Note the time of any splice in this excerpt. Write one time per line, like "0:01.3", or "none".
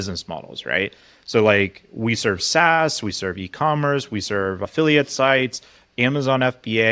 none